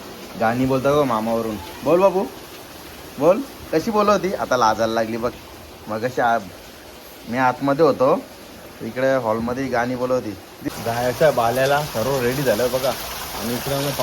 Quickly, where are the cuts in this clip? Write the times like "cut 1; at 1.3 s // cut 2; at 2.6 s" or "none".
cut 1; at 10.5 s